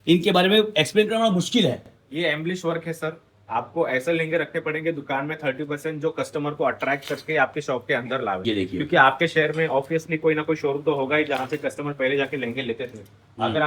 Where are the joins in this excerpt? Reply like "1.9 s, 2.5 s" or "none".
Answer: none